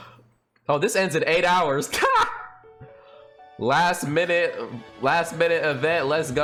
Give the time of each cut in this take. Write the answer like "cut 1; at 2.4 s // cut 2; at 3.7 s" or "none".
none

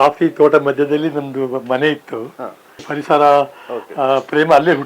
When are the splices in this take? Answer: cut 1; at 2.9 s

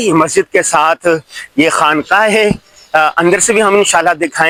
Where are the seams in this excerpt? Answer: none

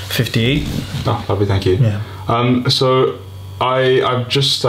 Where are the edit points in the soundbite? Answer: cut 1; at 1.2 s

